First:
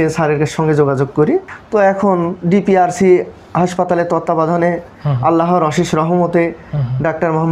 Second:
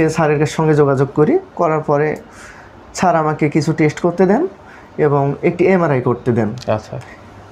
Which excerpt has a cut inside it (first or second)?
first